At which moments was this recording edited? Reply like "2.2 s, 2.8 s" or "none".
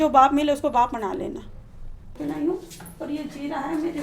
2.1 s

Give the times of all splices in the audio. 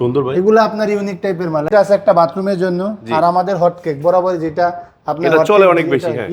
1.7 s

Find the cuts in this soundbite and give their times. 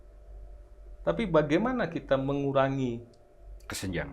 none

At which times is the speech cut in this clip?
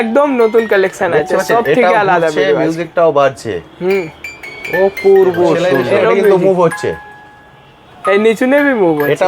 5.6 s

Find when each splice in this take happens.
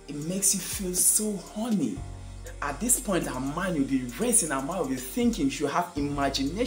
2.5 s

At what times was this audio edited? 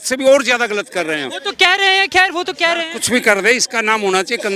none

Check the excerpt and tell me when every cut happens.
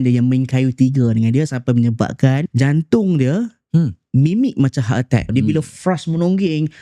2.5 s, 5.3 s

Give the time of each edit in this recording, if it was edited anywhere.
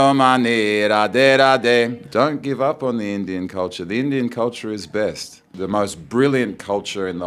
2.0 s, 5.5 s

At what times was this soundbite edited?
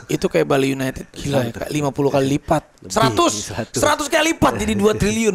1.1 s

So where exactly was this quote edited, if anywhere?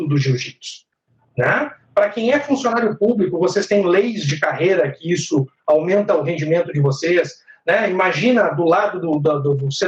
none

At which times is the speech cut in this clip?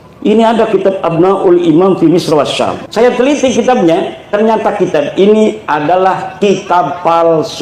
2.8 s

